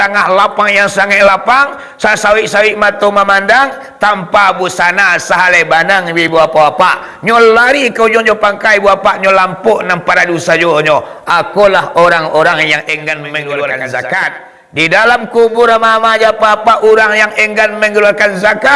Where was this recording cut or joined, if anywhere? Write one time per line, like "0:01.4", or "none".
0:13.8